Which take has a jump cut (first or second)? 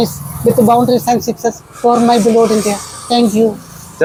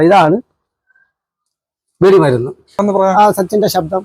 second